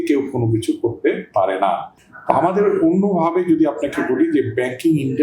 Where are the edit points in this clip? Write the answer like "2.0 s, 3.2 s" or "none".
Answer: 2.0 s

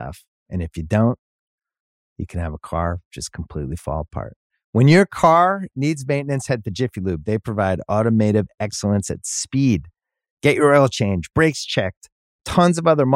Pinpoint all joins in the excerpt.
none

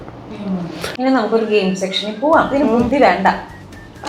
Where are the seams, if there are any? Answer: 0.8 s, 2.5 s

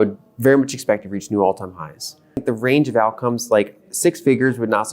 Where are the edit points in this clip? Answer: 2.4 s

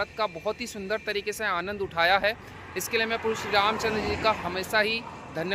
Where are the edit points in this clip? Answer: none

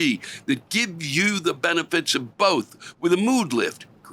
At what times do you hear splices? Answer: none

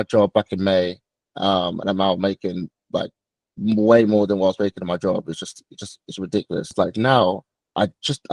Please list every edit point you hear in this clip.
6.7 s

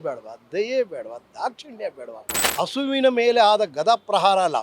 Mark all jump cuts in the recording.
2.4 s

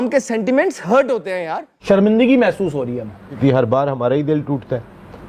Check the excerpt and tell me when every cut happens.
1.8 s, 3.4 s

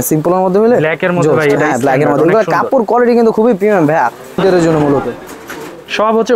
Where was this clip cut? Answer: 4.4 s

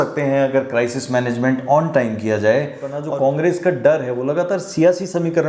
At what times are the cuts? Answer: 3.0 s

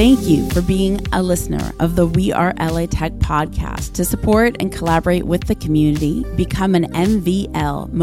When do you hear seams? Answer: none

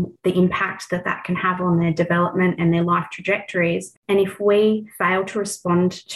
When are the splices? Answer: 3.9 s, 4.9 s

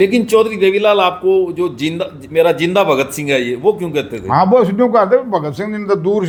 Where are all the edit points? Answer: none

